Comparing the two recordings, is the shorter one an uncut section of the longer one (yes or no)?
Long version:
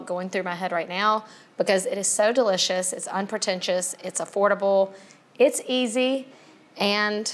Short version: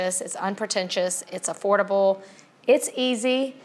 yes